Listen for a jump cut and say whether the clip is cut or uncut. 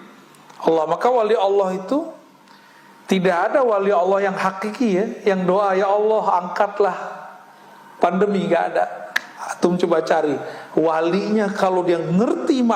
uncut